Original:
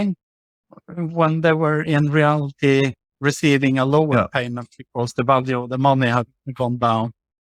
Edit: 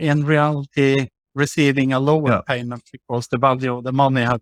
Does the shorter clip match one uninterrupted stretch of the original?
yes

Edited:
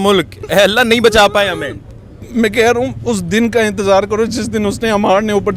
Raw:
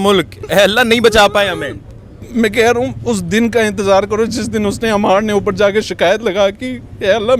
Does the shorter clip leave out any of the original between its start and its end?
no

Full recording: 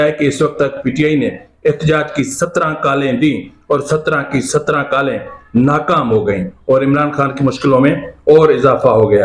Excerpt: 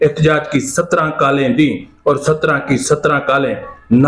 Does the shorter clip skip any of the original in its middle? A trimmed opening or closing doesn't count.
no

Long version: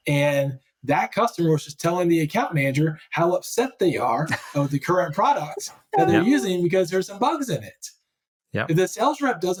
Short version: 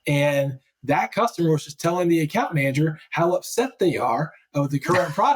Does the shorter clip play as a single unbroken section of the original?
yes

